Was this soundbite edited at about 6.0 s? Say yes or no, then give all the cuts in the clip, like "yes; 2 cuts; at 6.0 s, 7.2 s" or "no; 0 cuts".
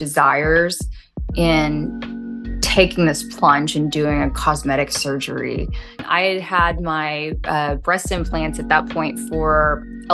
yes; 1 cut; at 6.0 s